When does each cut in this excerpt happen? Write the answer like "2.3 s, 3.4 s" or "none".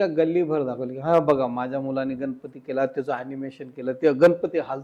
none